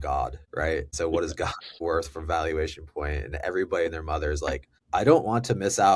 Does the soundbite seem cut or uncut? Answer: uncut